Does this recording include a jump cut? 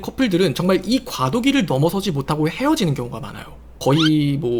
no; 0 cuts

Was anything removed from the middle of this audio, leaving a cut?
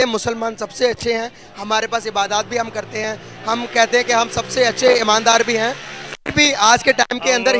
no; 0 cuts

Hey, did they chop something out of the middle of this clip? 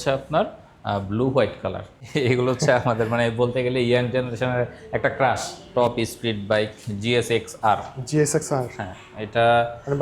yes; 2 cuts; at 1.9 s, 5.5 s

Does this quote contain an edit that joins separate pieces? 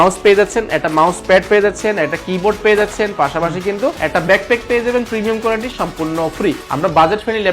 yes; 2 cuts; at 4.0 s, 6.6 s

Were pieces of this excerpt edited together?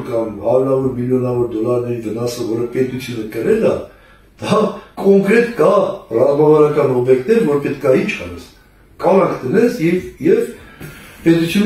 no; 0 cuts

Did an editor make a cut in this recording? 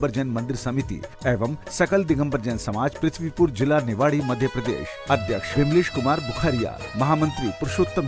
no; 0 cuts

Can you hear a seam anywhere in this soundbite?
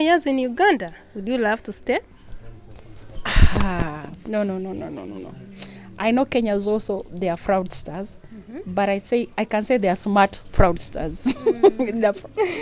yes; 1 cut; at 4.1 s

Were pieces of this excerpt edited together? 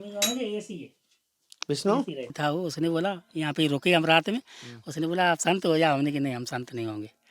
yes; 1 cut; at 2.4 s

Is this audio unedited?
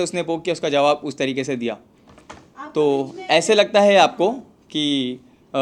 yes; 0 cuts

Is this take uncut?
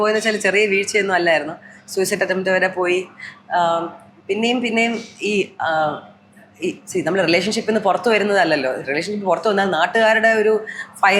yes; 0 cuts

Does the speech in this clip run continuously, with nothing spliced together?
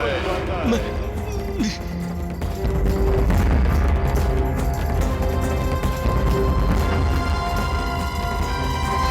yes; 0 cuts

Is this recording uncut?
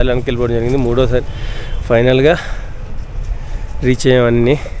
yes; 0 cuts

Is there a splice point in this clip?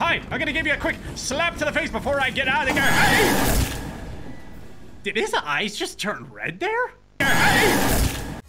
yes; 1 cut; at 7.2 s

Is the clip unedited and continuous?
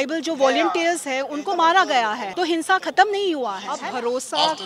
no; 2 cuts; at 2.2 s, 3.7 s

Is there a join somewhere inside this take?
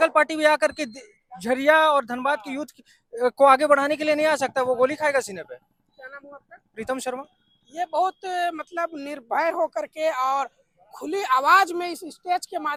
no; 0 cuts

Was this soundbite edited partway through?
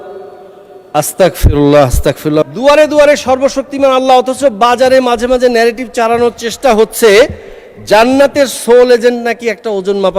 yes; 1 cut; at 2.4 s

